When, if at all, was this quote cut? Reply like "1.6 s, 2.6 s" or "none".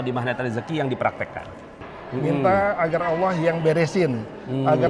1.9 s